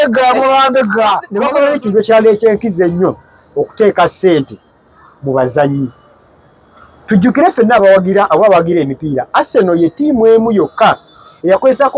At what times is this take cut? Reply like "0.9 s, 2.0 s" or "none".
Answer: 1.4 s